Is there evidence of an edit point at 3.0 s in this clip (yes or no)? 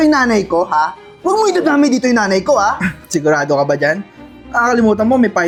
no